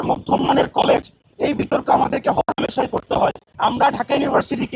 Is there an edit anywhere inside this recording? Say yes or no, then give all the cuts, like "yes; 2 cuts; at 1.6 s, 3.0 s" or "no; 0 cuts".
yes; 1 cut; at 3.5 s